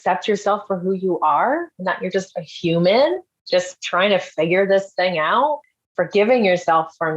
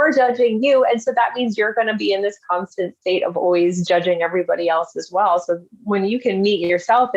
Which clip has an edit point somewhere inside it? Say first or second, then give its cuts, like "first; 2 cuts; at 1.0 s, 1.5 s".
first; 1 cut; at 5.6 s